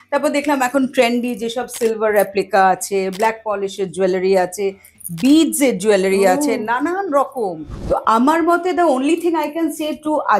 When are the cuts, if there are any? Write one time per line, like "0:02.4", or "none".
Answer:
0:07.7